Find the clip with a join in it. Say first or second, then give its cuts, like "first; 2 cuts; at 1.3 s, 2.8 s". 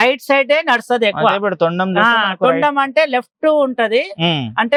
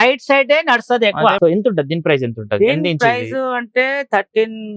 second; 1 cut; at 1.4 s